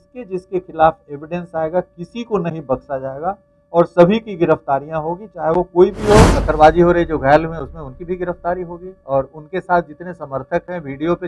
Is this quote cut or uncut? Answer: cut